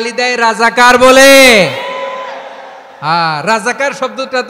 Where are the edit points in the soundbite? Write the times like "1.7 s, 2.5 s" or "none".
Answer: none